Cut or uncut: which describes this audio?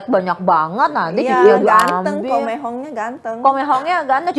uncut